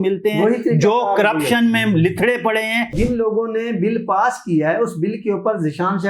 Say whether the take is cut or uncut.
cut